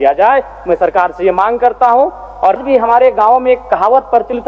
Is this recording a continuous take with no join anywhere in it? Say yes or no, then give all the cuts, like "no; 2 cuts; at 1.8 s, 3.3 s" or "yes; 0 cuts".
no; 1 cut; at 2.6 s